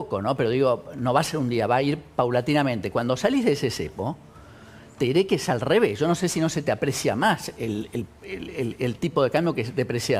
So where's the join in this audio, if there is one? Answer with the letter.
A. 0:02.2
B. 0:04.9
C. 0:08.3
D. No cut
D